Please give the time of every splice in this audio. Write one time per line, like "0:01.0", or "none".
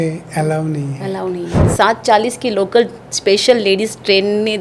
0:01.7